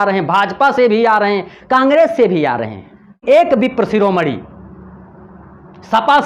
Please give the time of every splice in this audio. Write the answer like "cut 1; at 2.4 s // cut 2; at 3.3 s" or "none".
cut 1; at 3.2 s